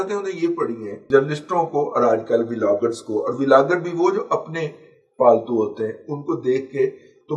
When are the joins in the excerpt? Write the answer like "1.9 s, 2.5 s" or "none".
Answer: 1.0 s